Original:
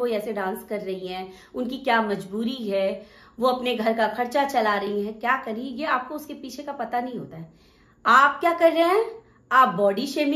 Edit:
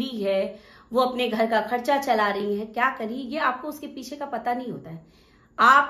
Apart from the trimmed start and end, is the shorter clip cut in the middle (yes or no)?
no